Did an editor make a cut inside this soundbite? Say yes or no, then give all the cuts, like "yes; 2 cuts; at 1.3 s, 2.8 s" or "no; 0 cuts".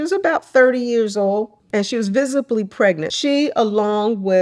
yes; 2 cuts; at 1.6 s, 3.1 s